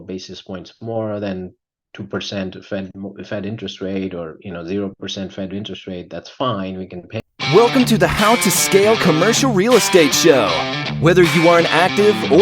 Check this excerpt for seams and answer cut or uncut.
cut